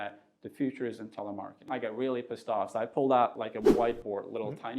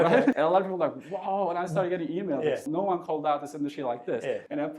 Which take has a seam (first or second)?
first